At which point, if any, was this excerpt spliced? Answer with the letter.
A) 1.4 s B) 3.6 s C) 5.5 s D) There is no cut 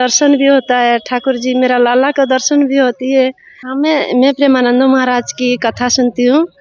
B